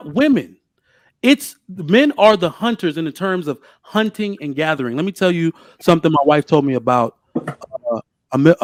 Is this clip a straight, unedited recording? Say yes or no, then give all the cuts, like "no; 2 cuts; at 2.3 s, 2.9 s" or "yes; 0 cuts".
yes; 0 cuts